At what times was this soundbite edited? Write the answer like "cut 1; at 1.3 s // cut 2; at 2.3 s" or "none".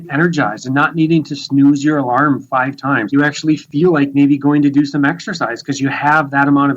cut 1; at 3.0 s